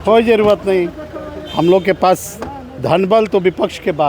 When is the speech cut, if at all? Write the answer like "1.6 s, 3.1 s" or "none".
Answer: none

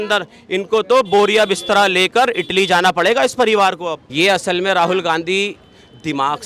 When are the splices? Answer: 4.0 s

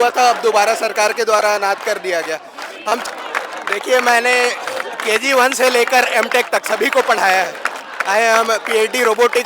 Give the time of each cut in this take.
3.0 s

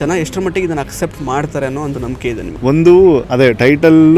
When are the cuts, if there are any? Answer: 2.5 s, 3.3 s

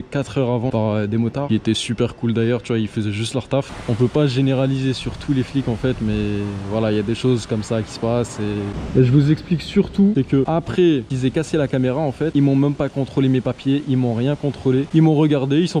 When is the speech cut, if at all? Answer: none

